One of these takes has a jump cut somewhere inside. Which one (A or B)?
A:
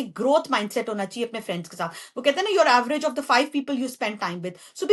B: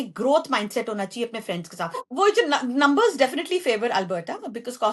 B